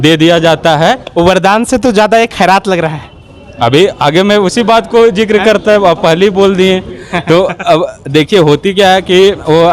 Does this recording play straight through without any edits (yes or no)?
yes